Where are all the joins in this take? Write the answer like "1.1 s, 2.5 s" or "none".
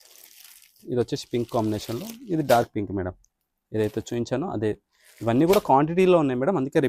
none

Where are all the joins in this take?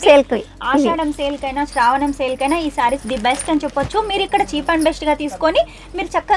none

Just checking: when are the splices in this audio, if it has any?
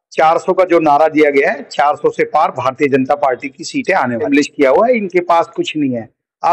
4.3 s

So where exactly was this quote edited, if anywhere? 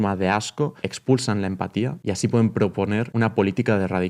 0.9 s, 2.0 s, 3.1 s

